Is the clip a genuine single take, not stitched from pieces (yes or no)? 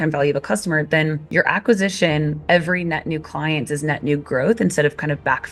yes